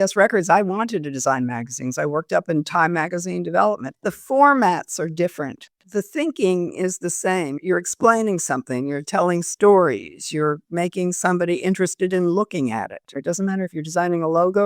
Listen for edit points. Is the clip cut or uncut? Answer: cut